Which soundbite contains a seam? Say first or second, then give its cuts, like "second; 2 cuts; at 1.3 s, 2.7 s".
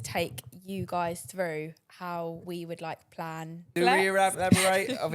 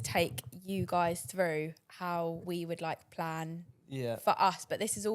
first; 1 cut; at 3.7 s